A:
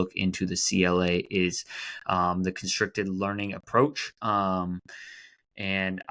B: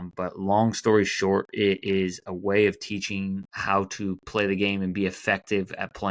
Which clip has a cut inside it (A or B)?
B